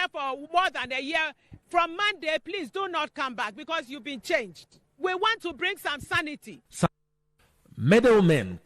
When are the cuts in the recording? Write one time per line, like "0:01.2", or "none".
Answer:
0:06.9